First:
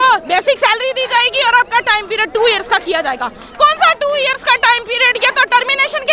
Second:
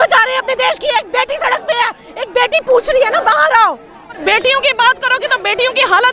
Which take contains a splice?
second; 1 cut; at 4.2 s

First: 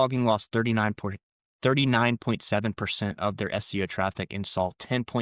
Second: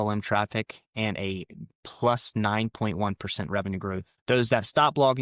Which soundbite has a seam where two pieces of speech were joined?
second; 1 cut; at 4.1 s

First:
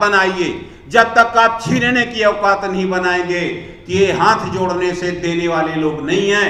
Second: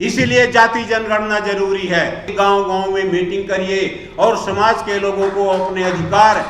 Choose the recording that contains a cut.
second; 1 cut; at 2.3 s

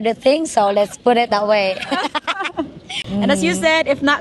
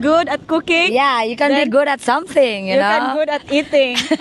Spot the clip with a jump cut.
first; 1 cut; at 3.0 s

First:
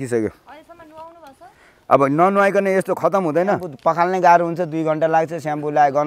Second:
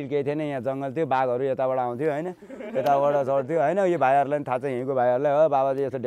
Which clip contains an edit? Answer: first; 1 cut; at 3.7 s

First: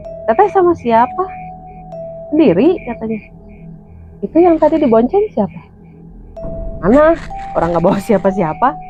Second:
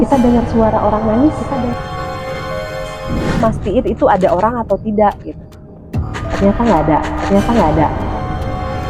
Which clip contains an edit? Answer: second; 1 cut; at 3.4 s

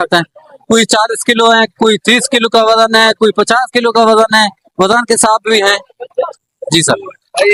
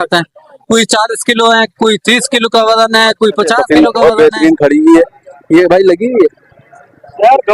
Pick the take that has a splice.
second; 1 cut; at 3.6 s

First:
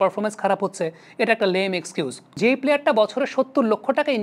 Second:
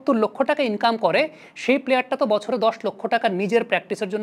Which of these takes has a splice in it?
first; 1 cut; at 2.4 s

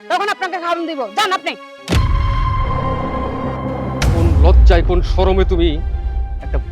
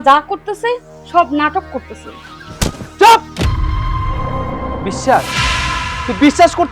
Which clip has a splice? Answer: first; 1 cut; at 4.1 s

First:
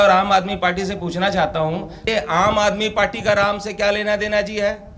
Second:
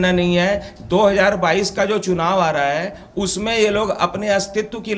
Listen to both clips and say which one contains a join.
first; 1 cut; at 2.0 s

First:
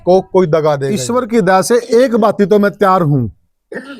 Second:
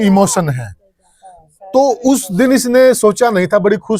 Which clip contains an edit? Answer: first; 1 cut; at 1.0 s

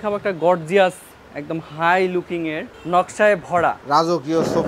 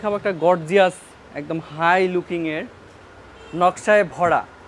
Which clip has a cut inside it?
first; 2 cuts; at 2.7 s, 3.8 s

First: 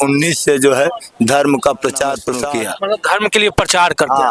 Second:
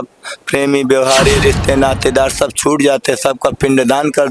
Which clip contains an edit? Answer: first; 1 cut; at 2.4 s

